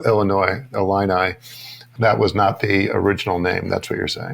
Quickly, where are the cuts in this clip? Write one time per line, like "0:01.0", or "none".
0:01.9